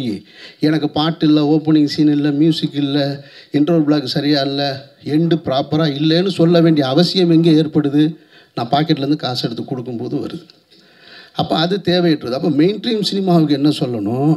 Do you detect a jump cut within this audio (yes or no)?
no